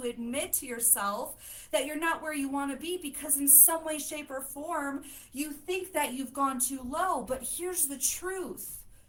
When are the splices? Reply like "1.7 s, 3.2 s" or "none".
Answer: none